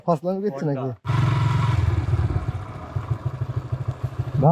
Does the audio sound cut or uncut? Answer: cut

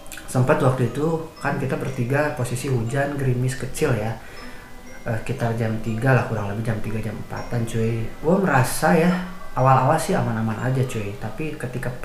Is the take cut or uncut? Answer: cut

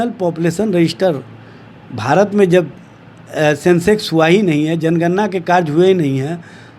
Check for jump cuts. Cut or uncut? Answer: uncut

